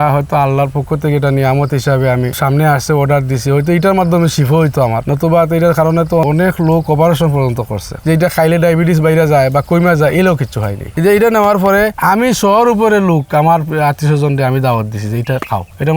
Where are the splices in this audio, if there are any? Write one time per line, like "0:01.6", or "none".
0:08.0
0:10.8